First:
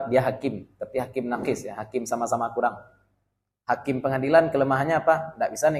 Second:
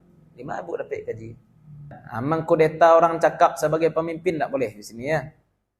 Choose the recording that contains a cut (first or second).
second